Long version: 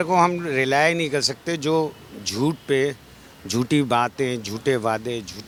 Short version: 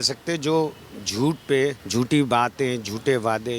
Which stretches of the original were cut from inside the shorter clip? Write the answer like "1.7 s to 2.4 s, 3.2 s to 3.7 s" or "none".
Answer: 3.0 s to 3.4 s